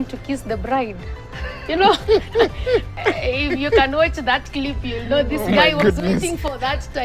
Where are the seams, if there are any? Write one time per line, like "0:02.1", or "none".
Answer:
0:02.9